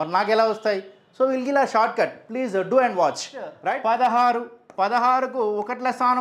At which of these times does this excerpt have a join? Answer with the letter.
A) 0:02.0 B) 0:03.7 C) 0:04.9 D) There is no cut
B